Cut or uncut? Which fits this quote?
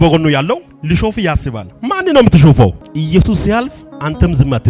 cut